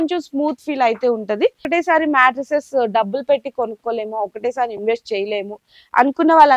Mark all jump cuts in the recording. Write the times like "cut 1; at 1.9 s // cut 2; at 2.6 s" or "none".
cut 1; at 1.6 s